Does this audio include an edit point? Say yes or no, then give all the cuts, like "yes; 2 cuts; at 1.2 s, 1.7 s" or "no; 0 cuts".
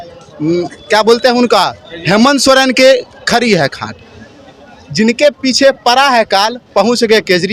no; 0 cuts